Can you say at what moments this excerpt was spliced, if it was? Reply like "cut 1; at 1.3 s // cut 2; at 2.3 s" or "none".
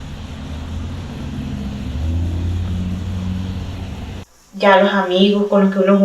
cut 1; at 1.8 s // cut 2; at 3.9 s